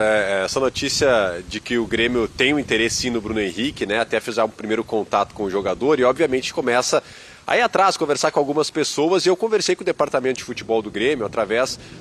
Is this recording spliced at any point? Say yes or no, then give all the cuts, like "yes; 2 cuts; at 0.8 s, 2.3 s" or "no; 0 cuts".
no; 0 cuts